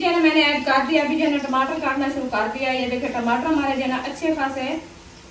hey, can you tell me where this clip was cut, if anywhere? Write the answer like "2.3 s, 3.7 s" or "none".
none